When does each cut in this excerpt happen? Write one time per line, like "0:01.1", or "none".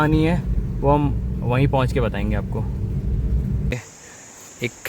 0:03.7